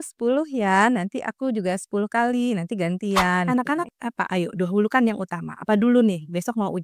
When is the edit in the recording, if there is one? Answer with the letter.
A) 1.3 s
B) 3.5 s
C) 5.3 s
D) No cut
B